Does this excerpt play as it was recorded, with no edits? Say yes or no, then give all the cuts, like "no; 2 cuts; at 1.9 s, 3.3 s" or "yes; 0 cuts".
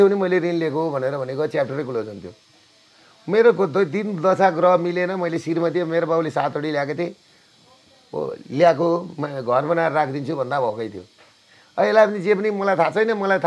yes; 0 cuts